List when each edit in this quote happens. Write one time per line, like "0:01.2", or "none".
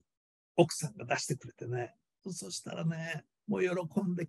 0:03.3